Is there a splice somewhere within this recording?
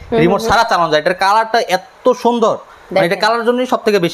no; 0 cuts

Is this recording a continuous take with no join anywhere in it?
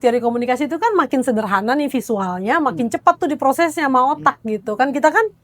yes; 0 cuts

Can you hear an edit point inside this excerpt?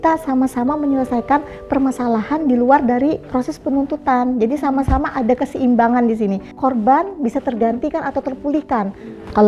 yes; 2 cuts; at 3.2 s, 6.5 s

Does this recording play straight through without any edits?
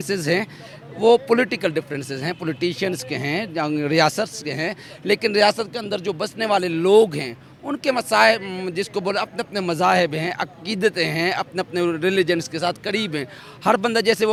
yes; 0 cuts

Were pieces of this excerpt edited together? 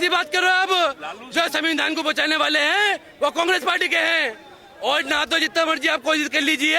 no; 0 cuts

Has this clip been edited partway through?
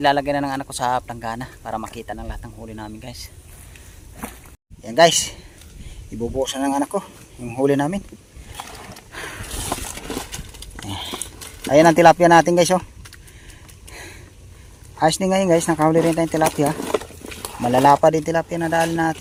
no; 0 cuts

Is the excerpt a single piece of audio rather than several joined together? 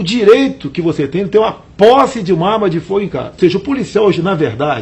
no; 1 cut; at 3.3 s

